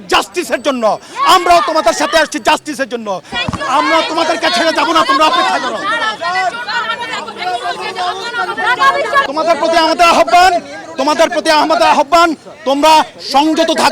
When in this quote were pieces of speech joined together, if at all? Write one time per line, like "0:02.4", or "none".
0:03.3